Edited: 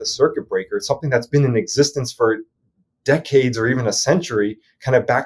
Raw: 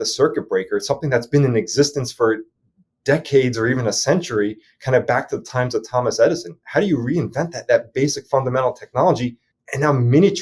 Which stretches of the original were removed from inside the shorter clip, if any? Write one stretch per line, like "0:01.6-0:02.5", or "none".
none